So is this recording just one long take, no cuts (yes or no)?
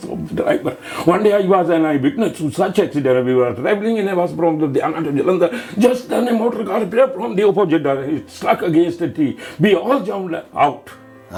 yes